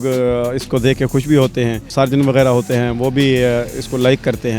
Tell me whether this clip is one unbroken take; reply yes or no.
no